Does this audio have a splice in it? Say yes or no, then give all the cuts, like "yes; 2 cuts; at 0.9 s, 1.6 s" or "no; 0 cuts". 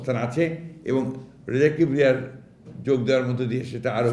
no; 0 cuts